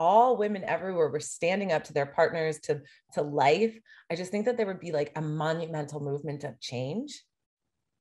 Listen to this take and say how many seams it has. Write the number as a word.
zero